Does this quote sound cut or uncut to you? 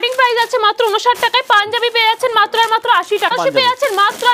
cut